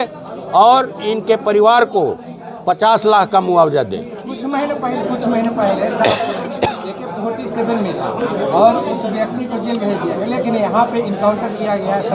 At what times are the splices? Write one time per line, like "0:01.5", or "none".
none